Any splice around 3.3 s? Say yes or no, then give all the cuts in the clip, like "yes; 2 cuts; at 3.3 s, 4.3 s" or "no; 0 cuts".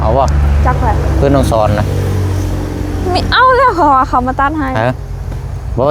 no; 0 cuts